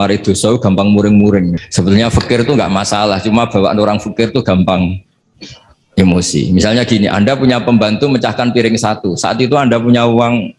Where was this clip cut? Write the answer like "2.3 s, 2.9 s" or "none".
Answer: 1.6 s

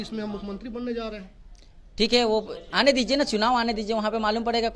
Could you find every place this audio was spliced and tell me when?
none

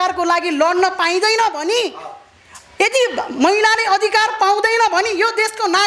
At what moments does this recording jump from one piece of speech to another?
none

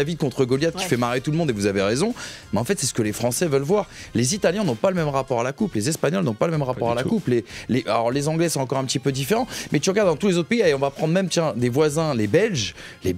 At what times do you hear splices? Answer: none

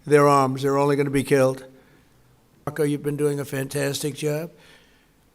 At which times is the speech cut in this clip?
2.7 s

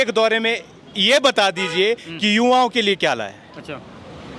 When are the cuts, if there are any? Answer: none

